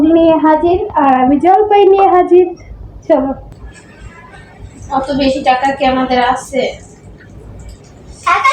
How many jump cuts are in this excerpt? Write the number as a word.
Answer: one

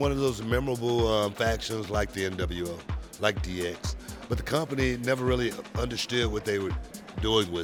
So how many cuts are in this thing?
zero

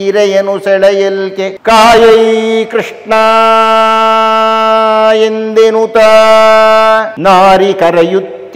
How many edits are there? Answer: two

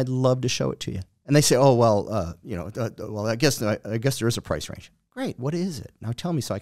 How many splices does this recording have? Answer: zero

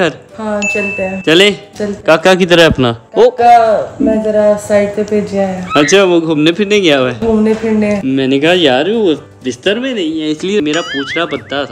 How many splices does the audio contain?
zero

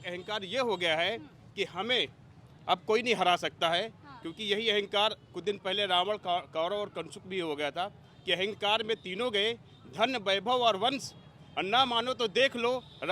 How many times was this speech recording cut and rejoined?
zero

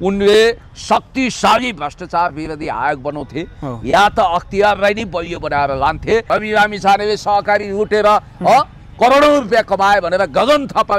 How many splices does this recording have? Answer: one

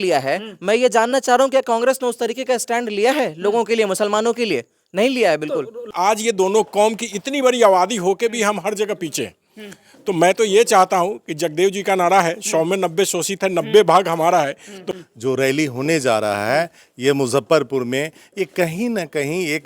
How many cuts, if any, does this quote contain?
two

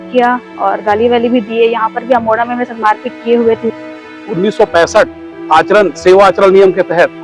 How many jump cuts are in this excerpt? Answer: one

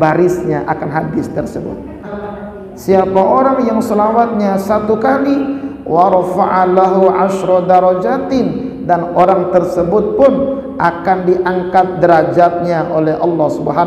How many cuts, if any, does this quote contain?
one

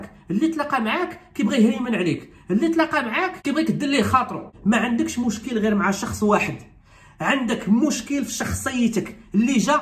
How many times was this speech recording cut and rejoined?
two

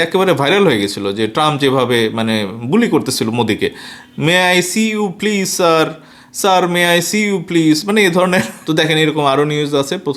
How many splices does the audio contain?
one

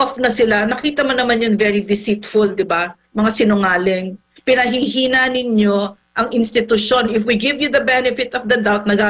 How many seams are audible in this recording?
one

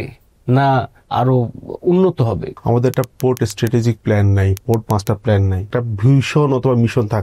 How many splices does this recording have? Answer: four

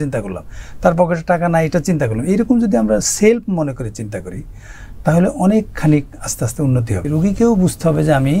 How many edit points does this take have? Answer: one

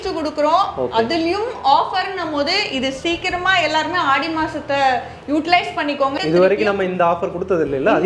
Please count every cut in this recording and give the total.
one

